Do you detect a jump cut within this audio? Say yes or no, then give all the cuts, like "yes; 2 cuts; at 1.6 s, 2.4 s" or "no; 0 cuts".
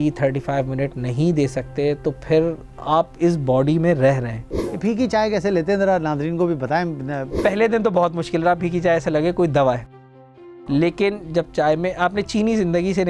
yes; 2 cuts; at 4.8 s, 7.4 s